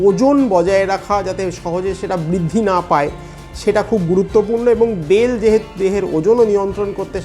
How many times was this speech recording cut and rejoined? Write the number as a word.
zero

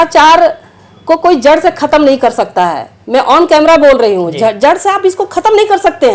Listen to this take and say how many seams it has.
zero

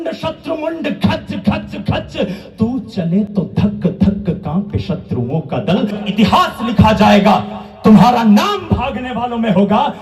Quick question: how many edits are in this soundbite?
one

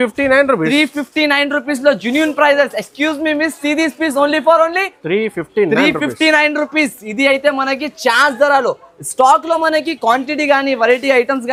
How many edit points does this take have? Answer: zero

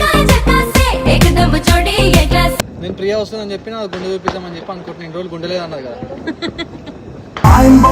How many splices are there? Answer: one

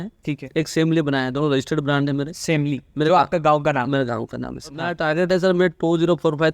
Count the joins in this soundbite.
one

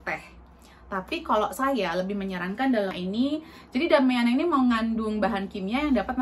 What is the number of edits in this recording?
one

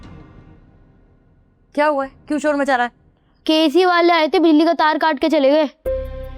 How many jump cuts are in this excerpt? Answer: zero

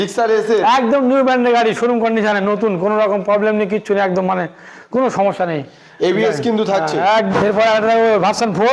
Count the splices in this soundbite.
one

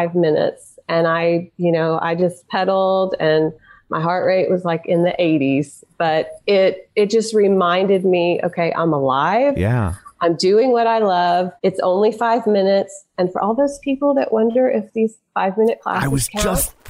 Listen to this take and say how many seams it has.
one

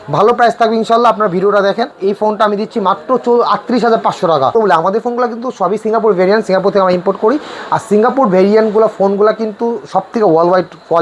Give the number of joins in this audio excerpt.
two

